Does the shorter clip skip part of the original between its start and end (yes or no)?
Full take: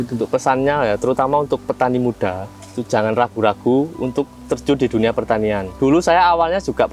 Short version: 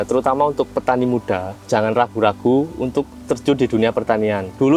yes